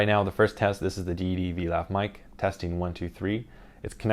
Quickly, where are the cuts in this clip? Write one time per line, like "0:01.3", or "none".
0:03.1